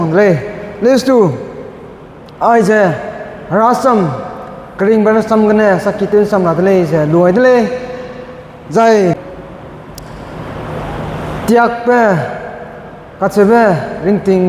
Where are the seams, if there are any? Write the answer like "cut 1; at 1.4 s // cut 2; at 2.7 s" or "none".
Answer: cut 1; at 9.3 s